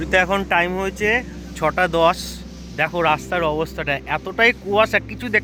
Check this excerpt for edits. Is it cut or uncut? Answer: uncut